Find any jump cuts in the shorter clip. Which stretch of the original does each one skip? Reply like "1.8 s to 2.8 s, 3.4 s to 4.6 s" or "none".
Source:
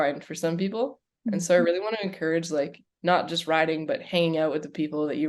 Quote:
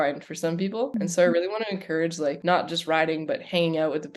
0.9 s to 1.2 s, 2.7 s to 3.0 s